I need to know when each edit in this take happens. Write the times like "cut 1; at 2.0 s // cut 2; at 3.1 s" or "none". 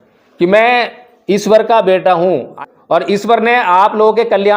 cut 1; at 2.5 s